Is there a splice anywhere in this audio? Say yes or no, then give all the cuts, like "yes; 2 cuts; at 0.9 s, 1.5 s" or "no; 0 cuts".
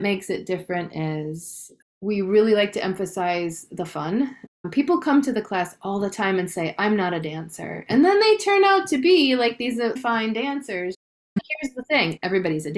yes; 1 cut; at 2.0 s